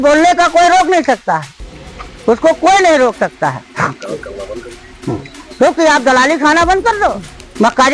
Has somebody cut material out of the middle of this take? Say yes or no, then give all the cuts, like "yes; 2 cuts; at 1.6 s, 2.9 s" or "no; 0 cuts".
no; 0 cuts